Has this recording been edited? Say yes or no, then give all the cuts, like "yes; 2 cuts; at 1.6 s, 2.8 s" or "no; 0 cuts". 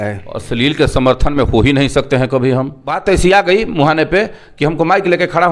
yes; 1 cut; at 2.9 s